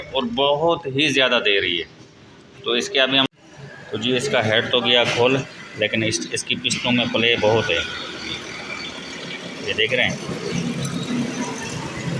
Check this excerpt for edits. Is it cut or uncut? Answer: cut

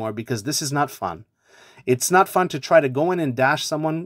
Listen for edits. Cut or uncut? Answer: uncut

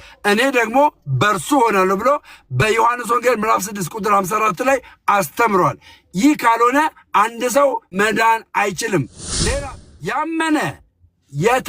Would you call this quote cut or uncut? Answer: cut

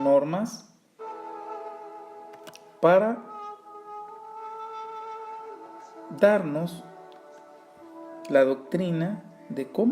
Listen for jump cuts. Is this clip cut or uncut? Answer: cut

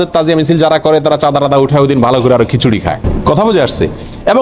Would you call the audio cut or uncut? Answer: cut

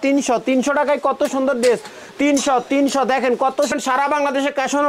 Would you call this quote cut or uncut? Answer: cut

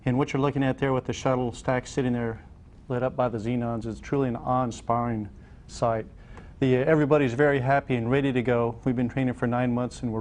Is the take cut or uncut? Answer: cut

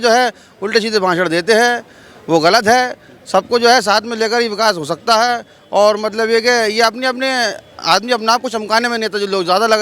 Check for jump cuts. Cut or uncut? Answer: uncut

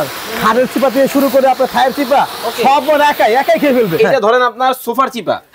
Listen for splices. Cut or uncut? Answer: cut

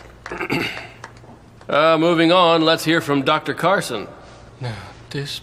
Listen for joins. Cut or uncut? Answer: uncut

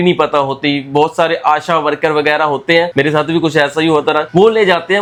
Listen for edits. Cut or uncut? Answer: uncut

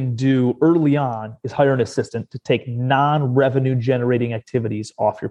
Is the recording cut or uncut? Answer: uncut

